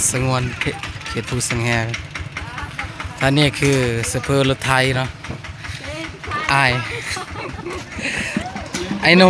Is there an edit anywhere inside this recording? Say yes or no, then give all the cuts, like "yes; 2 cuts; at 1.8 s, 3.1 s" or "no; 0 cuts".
no; 0 cuts